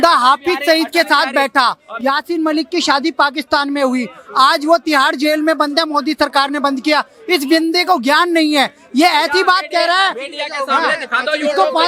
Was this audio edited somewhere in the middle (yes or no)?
no